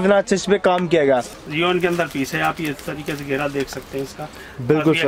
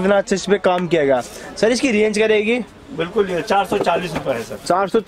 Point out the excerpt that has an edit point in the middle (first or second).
first